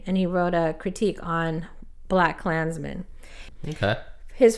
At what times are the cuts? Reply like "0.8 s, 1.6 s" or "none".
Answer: 3.5 s